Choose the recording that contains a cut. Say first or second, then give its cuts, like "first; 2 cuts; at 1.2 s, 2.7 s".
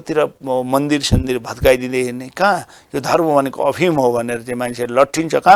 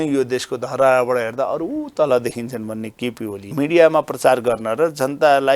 second; 1 cut; at 3.4 s